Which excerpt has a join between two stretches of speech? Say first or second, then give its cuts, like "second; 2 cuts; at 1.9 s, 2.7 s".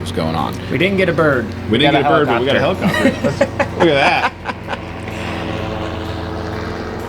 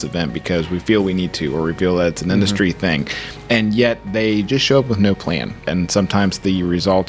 second; 1 cut; at 5.7 s